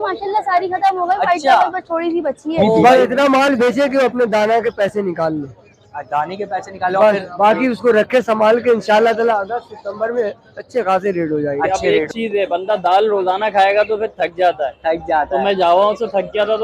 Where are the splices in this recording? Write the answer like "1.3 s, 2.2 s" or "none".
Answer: 2.8 s, 11.7 s